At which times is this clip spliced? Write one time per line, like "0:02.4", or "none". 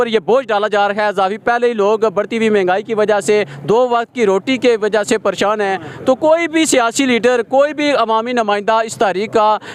none

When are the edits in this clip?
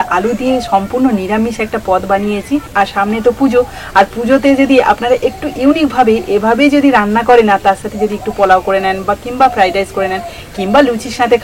none

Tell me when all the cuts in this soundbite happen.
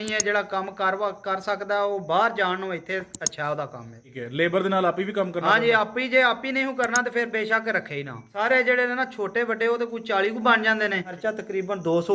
0:04.2
0:08.2
0:11.1

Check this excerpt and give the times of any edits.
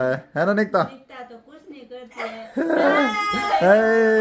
none

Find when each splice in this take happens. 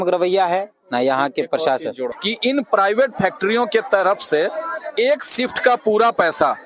0:02.1

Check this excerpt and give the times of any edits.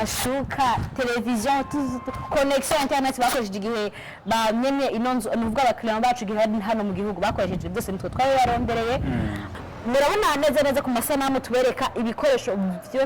0:09.4

